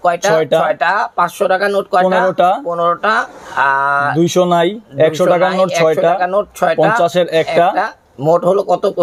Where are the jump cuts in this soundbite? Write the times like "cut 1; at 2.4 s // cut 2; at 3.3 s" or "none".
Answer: none